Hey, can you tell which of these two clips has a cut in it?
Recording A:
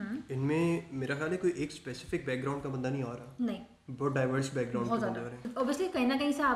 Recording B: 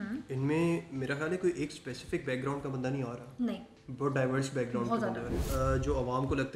B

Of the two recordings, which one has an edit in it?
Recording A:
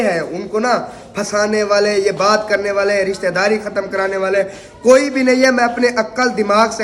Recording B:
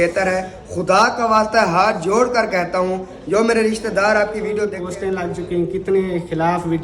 B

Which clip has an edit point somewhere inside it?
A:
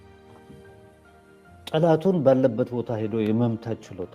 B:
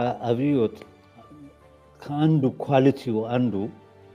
A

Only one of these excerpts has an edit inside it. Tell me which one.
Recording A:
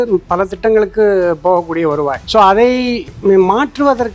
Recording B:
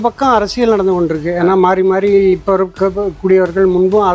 A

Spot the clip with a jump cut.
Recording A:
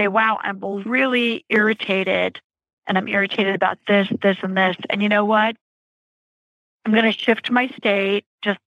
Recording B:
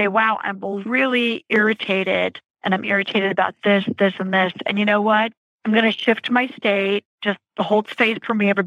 B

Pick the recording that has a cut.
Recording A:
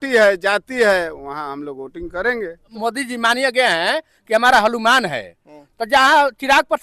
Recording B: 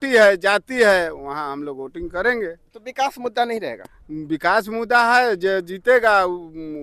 A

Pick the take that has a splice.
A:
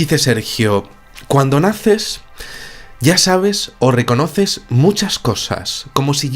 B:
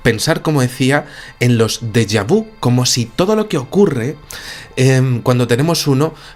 A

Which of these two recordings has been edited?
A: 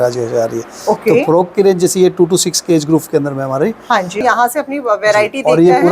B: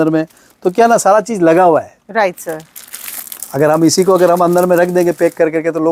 A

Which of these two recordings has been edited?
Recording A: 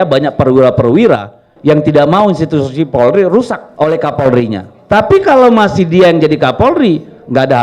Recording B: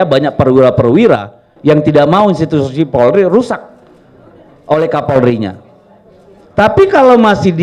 A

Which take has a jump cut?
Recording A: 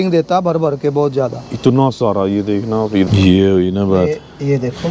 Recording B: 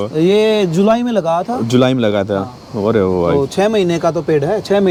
A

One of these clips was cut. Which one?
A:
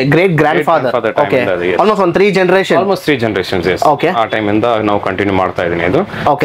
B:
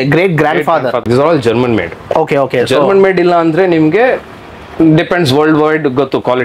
B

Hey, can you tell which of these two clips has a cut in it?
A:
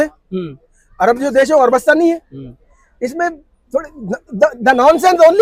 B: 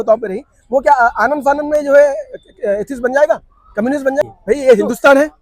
B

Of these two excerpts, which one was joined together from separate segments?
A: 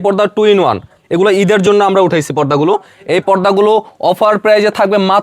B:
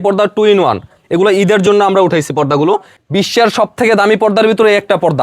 B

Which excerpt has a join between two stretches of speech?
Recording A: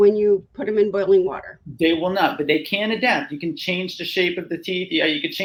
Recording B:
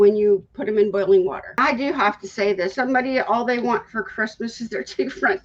B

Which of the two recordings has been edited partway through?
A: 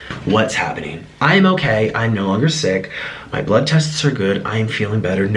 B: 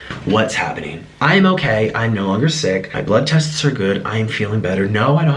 B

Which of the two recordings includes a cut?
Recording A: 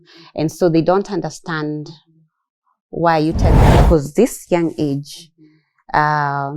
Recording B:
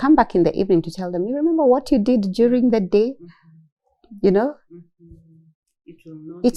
A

